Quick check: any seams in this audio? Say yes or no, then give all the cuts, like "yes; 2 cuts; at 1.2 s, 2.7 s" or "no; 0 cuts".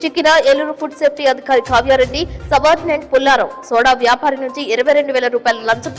no; 0 cuts